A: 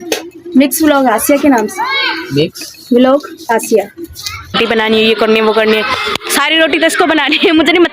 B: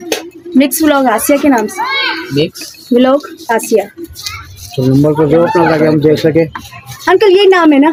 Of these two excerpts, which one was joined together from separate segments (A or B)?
A